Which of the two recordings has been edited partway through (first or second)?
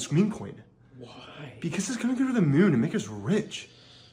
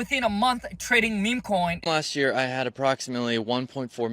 second